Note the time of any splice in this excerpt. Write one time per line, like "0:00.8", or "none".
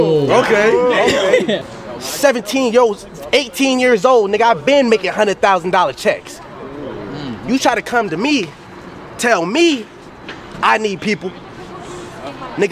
0:01.1
0:01.7